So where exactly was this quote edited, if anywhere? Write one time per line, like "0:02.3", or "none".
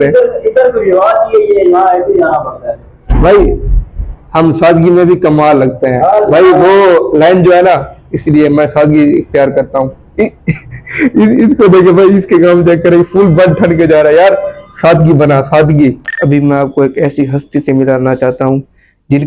0:16.1